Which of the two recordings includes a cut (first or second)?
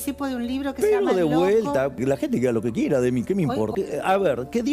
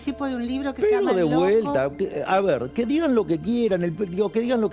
first